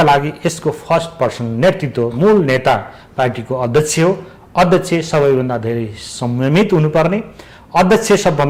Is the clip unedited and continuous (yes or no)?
yes